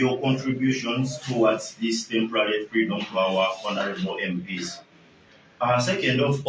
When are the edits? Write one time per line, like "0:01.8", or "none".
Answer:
none